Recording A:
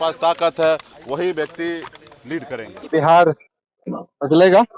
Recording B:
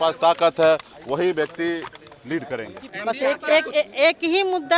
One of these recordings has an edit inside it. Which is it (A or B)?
B